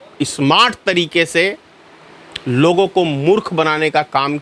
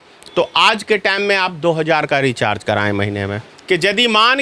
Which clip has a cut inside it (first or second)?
second